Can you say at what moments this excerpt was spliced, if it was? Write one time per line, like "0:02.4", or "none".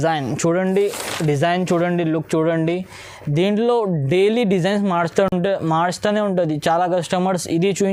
none